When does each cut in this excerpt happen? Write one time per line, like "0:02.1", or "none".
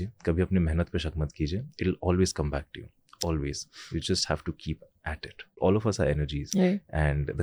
0:05.6